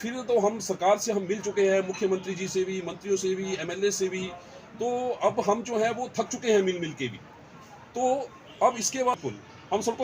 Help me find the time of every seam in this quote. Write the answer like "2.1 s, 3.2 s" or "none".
9.1 s